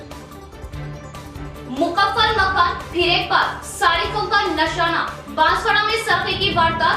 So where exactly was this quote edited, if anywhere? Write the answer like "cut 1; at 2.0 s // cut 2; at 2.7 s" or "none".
cut 1; at 1.5 s